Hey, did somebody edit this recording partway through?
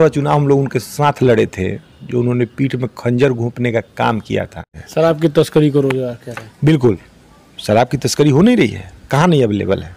yes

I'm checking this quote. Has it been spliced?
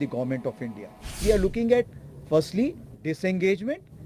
yes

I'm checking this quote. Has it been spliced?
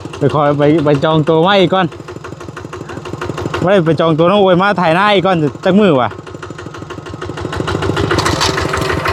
no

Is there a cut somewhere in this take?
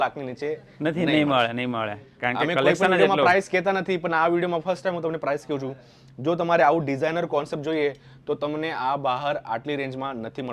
no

